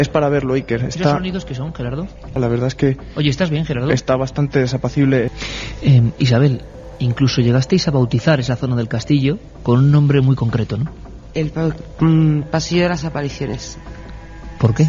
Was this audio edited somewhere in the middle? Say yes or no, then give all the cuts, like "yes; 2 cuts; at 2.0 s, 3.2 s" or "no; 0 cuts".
yes; 2 cuts; at 2.3 s, 5.3 s